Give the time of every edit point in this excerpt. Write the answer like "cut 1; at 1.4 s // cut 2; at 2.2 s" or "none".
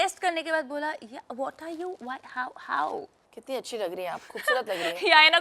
cut 1; at 3.2 s